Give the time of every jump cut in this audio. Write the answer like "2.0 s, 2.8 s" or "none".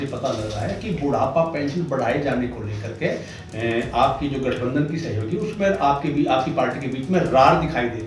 none